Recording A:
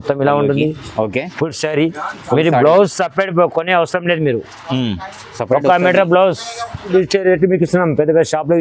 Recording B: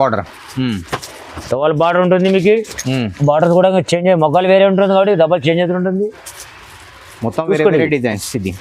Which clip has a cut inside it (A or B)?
A